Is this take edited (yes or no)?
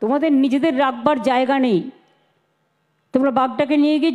no